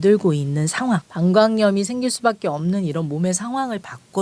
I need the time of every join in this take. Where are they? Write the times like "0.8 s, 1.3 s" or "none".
1.1 s